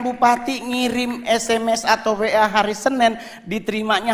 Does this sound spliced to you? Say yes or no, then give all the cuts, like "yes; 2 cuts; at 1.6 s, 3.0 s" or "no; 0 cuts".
no; 0 cuts